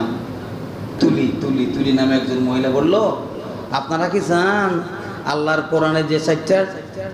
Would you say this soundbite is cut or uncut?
cut